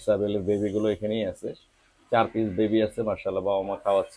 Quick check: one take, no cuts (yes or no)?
yes